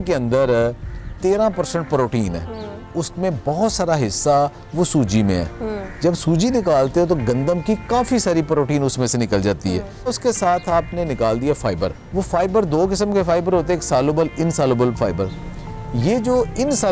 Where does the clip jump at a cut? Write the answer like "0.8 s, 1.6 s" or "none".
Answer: 2.9 s, 10.1 s, 12.0 s